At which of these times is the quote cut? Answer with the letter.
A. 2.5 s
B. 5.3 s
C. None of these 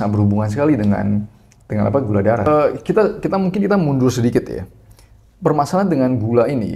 A